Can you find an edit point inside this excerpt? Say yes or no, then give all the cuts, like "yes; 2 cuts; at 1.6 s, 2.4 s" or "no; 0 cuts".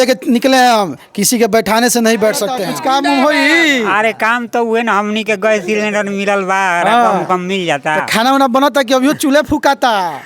yes; 1 cut; at 2.6 s